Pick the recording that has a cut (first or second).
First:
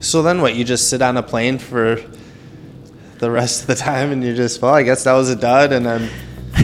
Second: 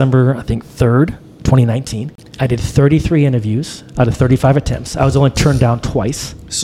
second